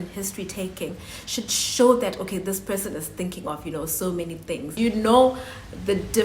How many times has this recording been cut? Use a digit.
1